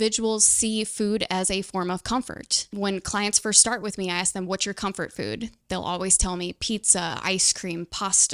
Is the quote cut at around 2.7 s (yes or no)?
yes